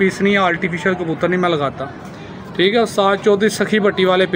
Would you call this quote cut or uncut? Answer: uncut